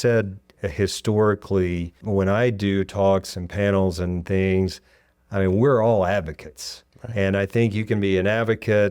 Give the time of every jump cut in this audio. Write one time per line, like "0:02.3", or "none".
0:02.0